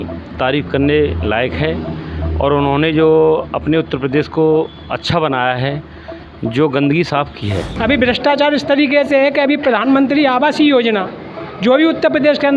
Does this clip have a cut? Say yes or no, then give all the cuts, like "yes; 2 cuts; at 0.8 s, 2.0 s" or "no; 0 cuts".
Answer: yes; 1 cut; at 7.7 s